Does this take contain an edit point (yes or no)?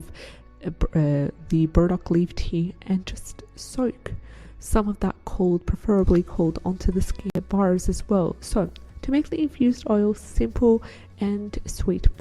yes